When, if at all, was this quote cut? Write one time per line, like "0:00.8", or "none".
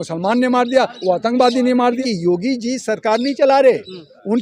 0:02.0

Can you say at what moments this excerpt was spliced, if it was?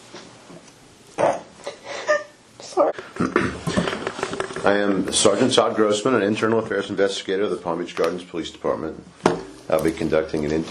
0:02.9

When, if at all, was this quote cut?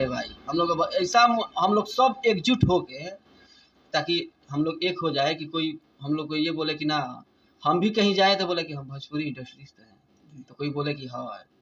none

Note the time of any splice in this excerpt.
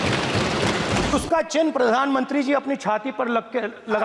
0:01.1

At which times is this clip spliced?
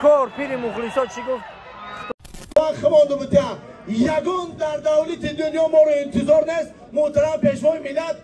0:02.5

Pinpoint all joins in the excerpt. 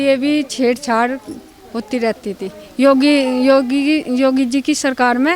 none

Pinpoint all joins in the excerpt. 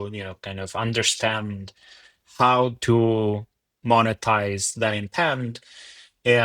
none

